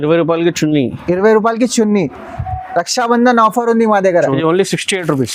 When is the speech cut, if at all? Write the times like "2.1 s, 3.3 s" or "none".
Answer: 4.4 s